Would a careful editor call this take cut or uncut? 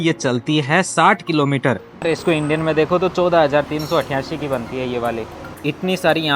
cut